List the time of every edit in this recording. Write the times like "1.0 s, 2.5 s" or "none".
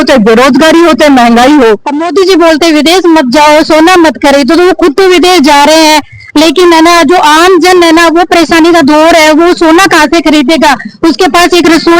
1.9 s